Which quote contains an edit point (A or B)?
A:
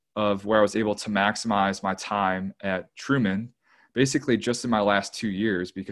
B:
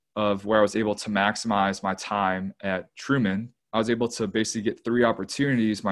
B